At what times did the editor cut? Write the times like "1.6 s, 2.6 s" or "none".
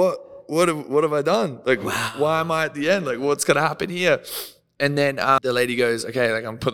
5.4 s